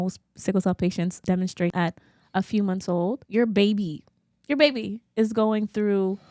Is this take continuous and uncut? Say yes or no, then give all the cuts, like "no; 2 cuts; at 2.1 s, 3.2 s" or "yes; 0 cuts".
no; 2 cuts; at 1.6 s, 3.2 s